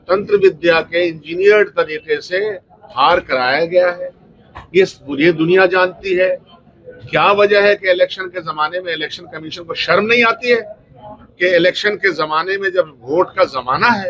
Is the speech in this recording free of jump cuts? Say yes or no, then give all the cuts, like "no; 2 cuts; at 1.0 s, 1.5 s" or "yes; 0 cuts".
yes; 0 cuts